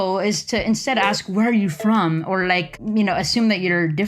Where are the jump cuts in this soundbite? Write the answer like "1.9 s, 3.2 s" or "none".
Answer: 2.7 s